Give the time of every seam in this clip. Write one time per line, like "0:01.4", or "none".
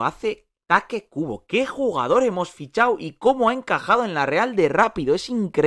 none